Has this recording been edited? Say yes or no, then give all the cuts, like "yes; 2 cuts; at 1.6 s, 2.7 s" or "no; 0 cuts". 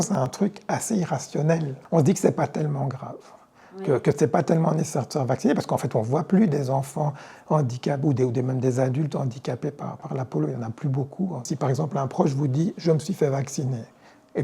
yes; 2 cuts; at 1.7 s, 11.5 s